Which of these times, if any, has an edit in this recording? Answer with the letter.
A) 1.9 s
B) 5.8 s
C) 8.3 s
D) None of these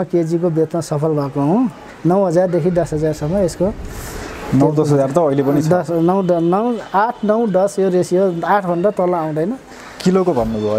A